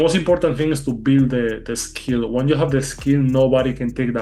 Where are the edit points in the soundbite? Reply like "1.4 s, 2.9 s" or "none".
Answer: none